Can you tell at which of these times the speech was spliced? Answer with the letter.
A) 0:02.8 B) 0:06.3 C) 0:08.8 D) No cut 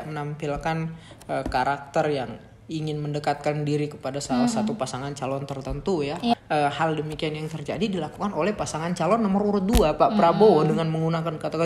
B